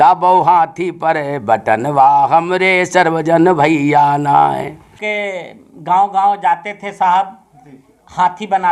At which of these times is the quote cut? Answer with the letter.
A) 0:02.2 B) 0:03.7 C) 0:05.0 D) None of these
C